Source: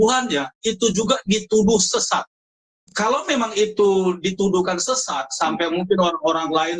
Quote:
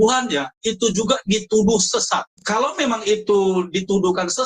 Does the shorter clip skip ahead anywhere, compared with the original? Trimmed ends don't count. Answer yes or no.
yes